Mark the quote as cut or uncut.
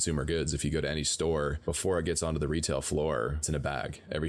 cut